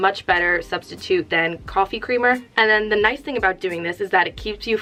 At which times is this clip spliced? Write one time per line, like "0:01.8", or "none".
none